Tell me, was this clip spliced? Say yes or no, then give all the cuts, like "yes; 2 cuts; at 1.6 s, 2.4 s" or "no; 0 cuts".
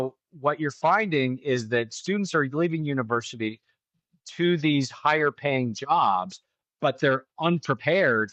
no; 0 cuts